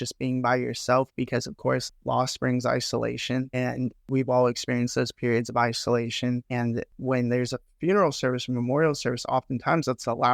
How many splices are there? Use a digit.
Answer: 3